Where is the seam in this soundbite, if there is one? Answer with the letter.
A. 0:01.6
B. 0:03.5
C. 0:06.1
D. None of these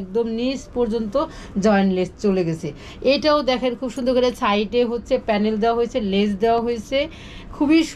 D